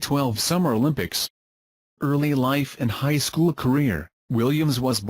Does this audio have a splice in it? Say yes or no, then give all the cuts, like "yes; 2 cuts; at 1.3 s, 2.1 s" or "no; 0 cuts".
yes; 1 cut; at 2.9 s